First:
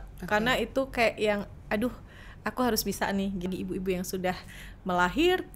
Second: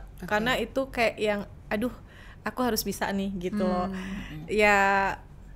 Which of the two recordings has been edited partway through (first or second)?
first